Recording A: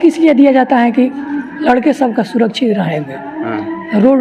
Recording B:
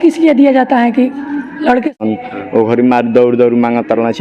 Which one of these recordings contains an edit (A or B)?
B